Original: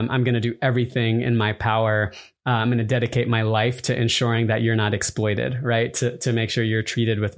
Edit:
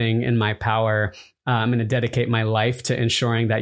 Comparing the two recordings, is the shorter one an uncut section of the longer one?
yes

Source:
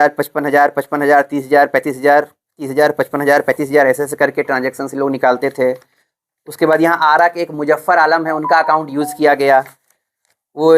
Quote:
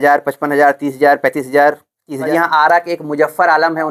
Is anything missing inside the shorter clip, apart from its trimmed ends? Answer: yes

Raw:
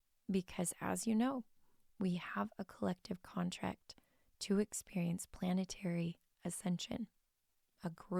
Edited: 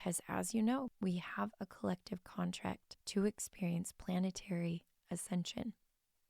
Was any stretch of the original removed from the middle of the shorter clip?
yes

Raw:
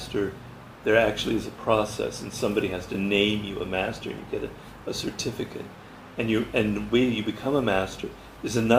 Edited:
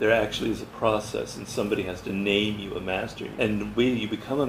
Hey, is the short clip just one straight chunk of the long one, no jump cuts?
no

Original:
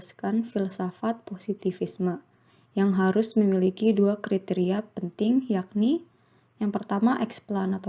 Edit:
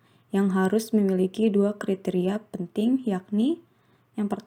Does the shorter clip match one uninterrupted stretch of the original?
yes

